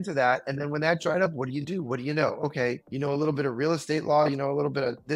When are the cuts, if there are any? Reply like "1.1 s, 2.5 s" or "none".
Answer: 2.9 s